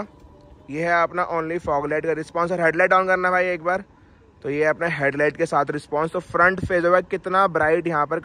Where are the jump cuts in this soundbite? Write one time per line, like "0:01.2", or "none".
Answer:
none